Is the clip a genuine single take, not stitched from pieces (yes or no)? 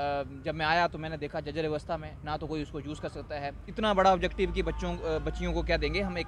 yes